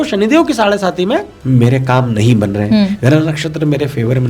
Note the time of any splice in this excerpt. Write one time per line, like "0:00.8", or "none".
0:01.3